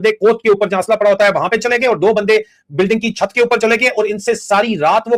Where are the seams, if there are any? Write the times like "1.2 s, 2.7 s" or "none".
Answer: none